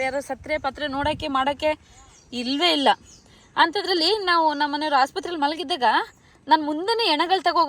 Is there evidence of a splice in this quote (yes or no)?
no